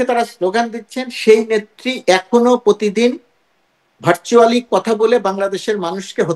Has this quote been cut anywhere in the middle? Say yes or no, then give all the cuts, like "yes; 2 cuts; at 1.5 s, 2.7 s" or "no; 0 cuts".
no; 0 cuts